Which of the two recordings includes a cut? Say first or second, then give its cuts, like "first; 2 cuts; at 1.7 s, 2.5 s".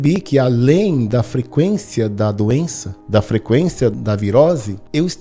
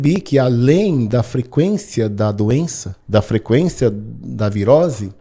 first; 1 cut; at 4.0 s